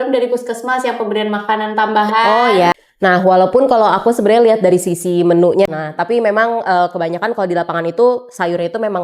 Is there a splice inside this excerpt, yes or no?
yes